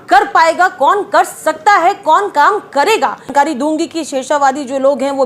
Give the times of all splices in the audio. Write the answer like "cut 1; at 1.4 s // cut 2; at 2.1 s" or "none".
cut 1; at 3.3 s